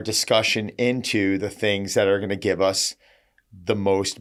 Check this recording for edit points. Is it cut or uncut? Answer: uncut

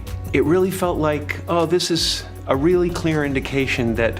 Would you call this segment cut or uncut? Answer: uncut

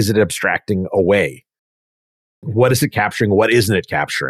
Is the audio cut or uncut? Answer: uncut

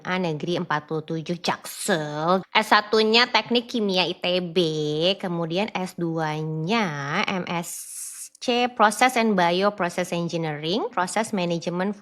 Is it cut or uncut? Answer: cut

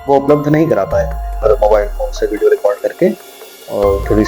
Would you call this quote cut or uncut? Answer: cut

